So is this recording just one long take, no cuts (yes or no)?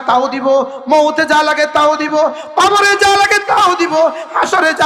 yes